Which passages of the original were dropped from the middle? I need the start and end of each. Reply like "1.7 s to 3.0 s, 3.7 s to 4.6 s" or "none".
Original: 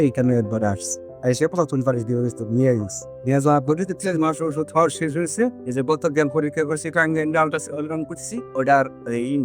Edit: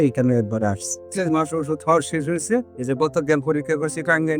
1.0 s to 3.9 s